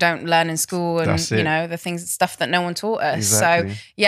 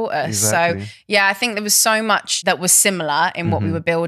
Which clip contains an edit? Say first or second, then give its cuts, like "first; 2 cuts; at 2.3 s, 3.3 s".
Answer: second; 1 cut; at 2.3 s